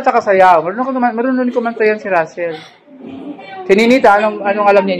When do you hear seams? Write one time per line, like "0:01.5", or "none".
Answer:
0:03.5